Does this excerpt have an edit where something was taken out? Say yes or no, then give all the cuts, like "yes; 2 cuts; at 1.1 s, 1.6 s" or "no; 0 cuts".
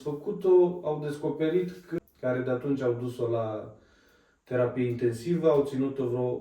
yes; 1 cut; at 1.9 s